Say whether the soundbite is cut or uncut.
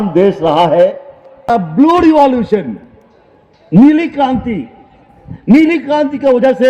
cut